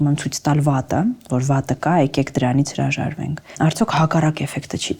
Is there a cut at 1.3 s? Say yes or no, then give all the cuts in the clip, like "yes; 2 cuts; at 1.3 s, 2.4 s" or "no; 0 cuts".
no; 0 cuts